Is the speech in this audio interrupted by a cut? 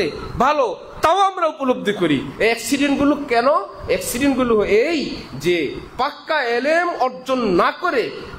no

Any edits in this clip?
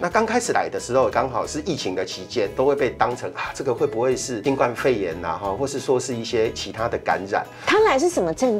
yes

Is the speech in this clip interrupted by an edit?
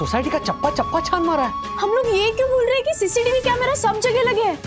yes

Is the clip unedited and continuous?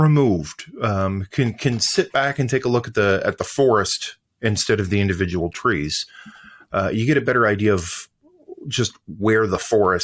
yes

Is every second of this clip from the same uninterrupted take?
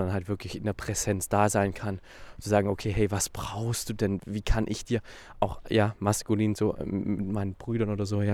yes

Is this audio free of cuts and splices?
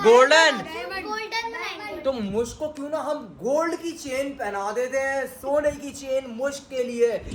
yes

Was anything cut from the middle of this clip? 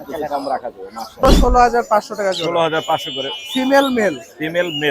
yes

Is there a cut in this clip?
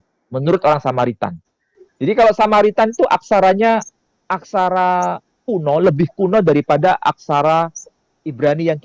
no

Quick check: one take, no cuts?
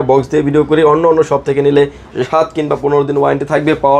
yes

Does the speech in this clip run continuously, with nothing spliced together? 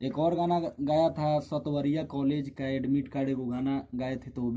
yes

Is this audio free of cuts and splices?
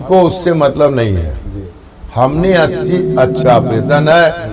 no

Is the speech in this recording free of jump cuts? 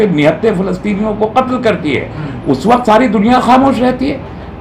yes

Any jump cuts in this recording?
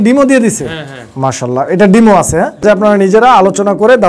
yes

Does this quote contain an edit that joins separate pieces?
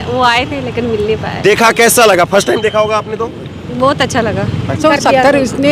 yes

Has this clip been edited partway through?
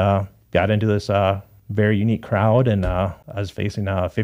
yes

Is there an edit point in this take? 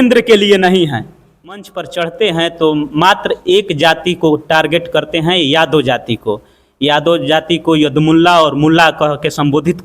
yes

